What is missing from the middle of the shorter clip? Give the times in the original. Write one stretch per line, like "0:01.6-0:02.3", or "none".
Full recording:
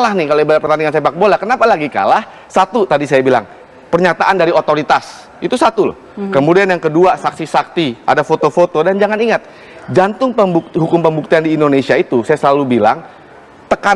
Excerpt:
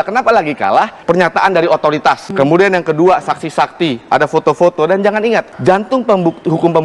0:02.3-0:03.8
0:05.1-0:06.2
0:09.5-0:09.8